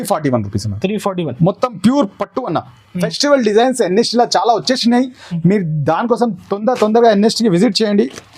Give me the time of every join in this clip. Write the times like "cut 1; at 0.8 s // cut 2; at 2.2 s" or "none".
cut 1; at 3.1 s